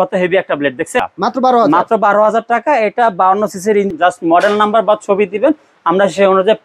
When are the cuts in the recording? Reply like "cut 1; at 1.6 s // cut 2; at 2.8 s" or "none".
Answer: cut 1; at 1.0 s // cut 2; at 3.9 s